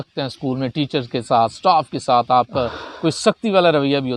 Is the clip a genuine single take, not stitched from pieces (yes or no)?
yes